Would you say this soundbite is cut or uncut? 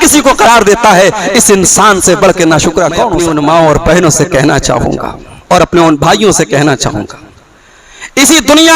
cut